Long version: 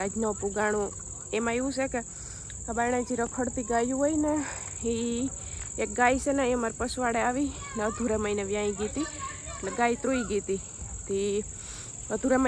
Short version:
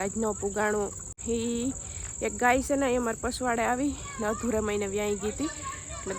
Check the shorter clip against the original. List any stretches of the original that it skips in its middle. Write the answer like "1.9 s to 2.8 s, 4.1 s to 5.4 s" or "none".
1.1 s to 4.6 s